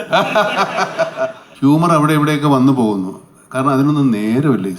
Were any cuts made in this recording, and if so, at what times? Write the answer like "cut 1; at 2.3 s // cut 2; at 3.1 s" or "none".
cut 1; at 1.4 s